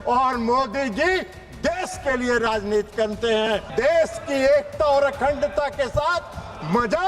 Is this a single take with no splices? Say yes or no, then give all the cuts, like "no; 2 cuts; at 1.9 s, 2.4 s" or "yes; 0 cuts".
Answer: no; 1 cut; at 3.7 s